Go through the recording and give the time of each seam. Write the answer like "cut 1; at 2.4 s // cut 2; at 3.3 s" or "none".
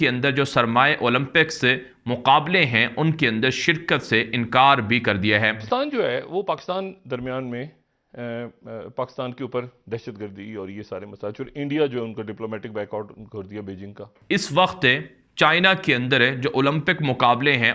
cut 1; at 5.6 s // cut 2; at 14.1 s